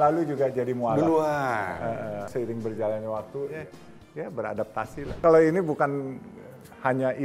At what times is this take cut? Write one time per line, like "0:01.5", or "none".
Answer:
0:02.3
0:03.6
0:05.2